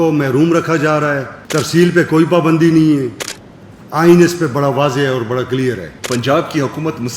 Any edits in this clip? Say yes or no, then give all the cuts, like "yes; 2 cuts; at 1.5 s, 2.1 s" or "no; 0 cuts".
yes; 2 cuts; at 1.3 s, 5.9 s